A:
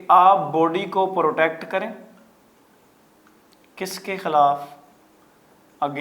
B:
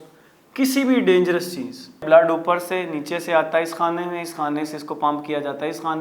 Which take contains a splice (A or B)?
B